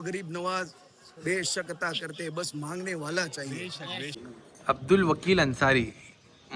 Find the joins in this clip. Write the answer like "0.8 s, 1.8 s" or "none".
4.2 s